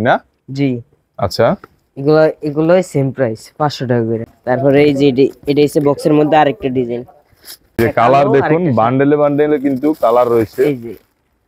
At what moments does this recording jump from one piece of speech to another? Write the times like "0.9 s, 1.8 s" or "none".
4.2 s, 7.8 s